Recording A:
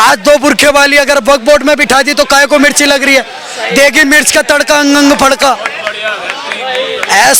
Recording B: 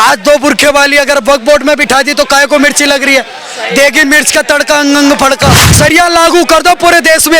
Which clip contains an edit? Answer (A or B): B